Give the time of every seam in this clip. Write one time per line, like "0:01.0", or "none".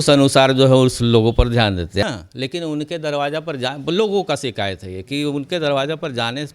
0:02.0